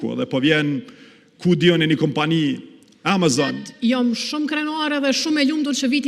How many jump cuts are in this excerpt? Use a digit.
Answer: 1